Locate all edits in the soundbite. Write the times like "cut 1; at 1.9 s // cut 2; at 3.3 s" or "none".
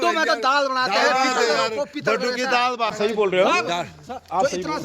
cut 1; at 2.9 s